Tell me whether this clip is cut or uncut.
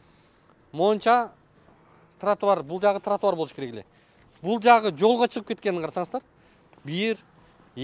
uncut